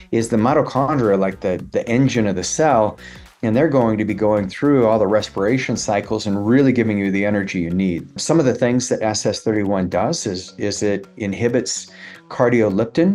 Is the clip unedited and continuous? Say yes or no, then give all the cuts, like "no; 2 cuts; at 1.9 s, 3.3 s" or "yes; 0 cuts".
no; 1 cut; at 8.2 s